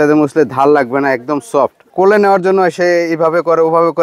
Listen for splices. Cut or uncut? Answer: cut